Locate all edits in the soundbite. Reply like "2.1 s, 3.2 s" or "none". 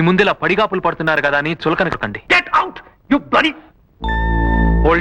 2.2 s